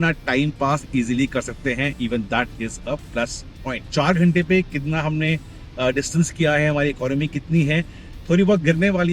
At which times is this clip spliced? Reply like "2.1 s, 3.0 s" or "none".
3.9 s